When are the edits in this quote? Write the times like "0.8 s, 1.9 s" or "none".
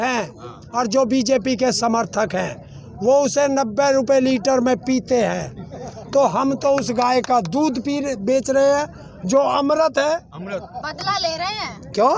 none